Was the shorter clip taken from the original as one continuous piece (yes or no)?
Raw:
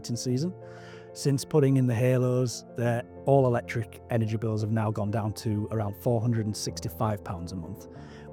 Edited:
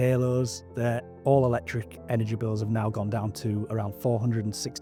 yes